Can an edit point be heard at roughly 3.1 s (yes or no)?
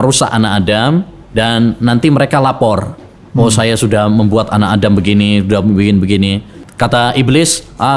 no